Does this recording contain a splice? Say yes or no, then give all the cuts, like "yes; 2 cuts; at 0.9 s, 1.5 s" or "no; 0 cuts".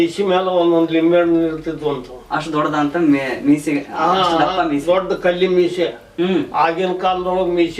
no; 0 cuts